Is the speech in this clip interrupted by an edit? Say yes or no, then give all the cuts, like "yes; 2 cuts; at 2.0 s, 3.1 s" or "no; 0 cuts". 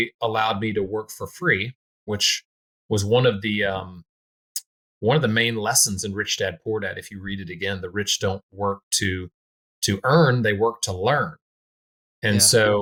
no; 0 cuts